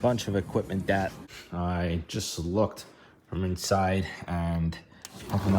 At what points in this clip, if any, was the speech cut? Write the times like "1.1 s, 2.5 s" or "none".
1.3 s